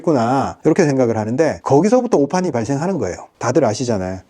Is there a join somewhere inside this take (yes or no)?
yes